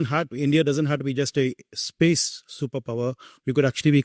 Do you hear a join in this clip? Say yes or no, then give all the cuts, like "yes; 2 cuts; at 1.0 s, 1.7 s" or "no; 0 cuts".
no; 0 cuts